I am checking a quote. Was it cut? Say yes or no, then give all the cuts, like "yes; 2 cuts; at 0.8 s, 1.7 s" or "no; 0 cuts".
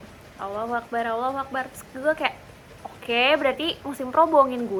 no; 0 cuts